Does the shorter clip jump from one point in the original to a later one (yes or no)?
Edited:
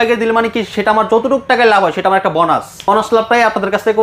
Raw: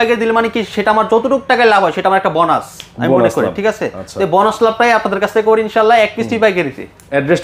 yes